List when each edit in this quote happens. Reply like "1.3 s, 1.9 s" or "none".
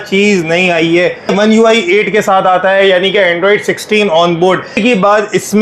1.3 s, 4.8 s